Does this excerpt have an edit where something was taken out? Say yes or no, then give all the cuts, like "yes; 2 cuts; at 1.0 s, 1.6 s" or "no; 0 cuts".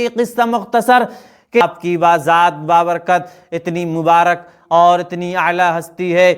yes; 1 cut; at 1.6 s